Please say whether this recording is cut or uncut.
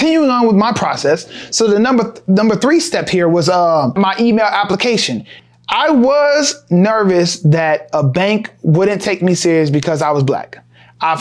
cut